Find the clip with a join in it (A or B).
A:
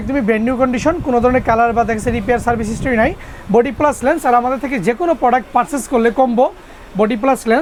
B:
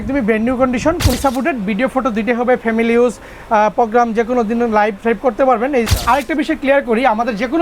B